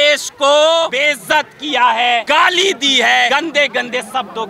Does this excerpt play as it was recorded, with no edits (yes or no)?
no